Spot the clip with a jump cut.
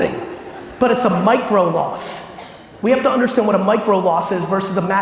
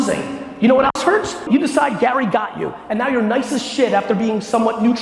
second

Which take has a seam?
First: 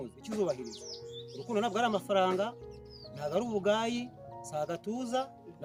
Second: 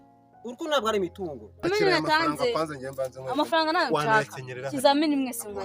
second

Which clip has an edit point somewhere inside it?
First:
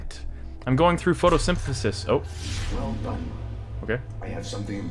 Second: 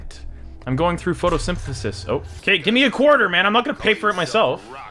second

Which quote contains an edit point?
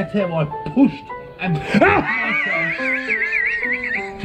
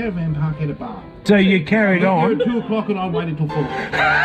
second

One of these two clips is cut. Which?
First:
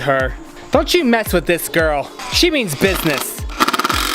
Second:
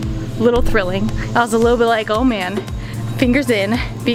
first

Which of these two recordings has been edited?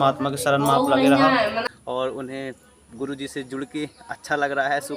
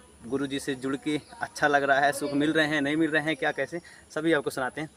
first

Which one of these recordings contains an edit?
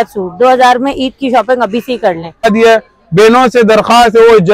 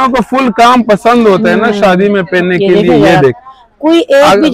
first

